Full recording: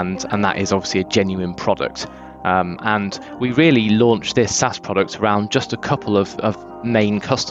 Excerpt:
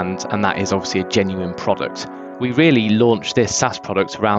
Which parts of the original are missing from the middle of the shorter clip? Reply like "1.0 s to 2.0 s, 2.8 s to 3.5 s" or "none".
2.2 s to 3.2 s